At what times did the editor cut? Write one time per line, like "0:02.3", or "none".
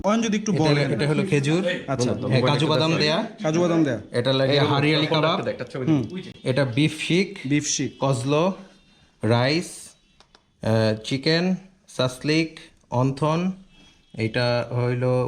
none